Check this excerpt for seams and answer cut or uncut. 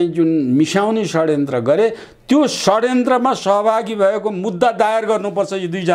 uncut